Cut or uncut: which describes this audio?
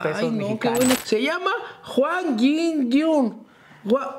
cut